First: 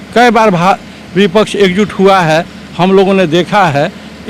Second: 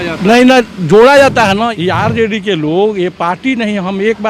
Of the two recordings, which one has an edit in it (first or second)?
second